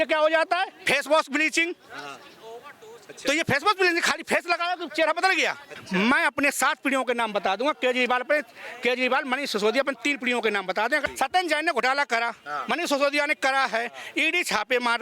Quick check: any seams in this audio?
yes; 2 cuts; at 5.8 s, 11.1 s

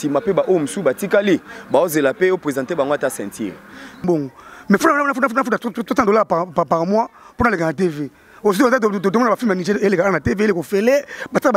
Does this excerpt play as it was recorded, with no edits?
no; 1 cut; at 4.0 s

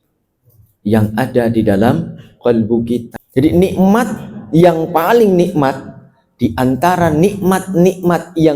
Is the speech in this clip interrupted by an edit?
yes; 1 cut; at 3.2 s

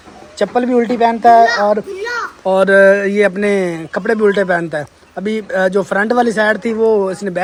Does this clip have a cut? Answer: no; 0 cuts

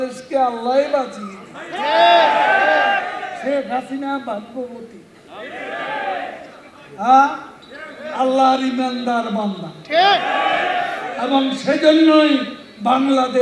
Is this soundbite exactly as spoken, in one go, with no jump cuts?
yes; 0 cuts

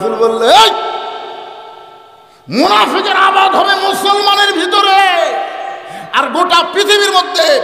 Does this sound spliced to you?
no; 0 cuts

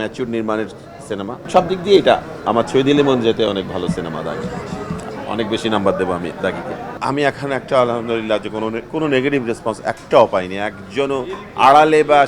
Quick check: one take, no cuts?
no; 2 cuts; at 1.5 s, 6.9 s

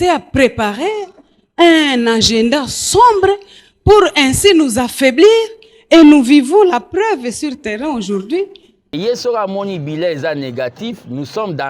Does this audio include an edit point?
yes; 1 cut; at 8.9 s

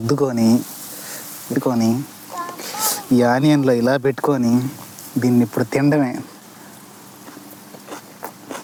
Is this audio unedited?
yes; 0 cuts

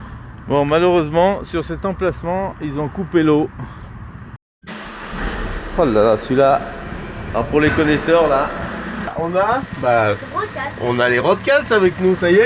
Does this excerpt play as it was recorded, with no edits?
no; 2 cuts; at 4.4 s, 9.1 s

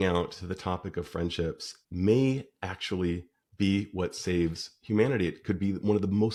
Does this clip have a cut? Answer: no; 0 cuts

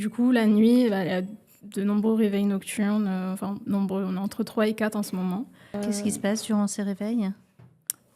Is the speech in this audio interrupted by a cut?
yes; 1 cut; at 5.8 s

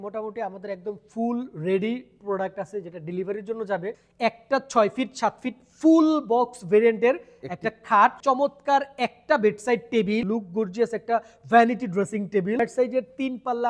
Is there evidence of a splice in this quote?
yes; 4 cuts; at 4.0 s, 8.2 s, 10.2 s, 12.6 s

